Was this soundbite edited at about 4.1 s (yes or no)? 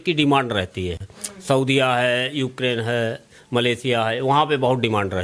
no